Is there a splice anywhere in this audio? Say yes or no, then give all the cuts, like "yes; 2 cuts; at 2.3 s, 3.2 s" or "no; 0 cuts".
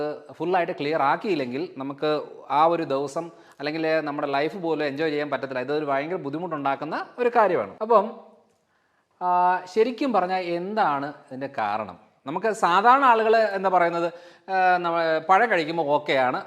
no; 0 cuts